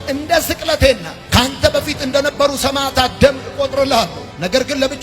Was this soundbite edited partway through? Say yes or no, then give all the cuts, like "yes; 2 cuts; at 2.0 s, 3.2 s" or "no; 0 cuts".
no; 0 cuts